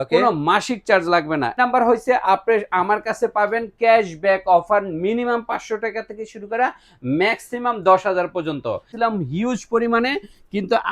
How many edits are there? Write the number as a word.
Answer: two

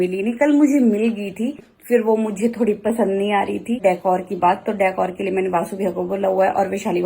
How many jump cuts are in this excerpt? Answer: two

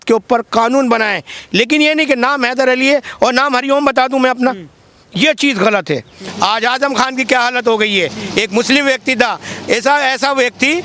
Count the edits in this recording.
two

